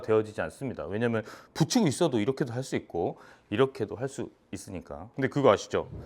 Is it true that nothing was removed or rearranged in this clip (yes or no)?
no